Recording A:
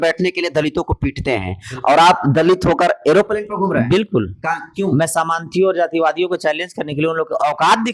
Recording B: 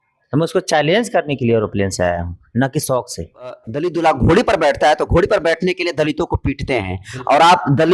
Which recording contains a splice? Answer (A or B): B